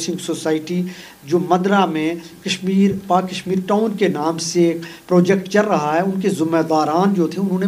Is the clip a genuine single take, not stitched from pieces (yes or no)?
yes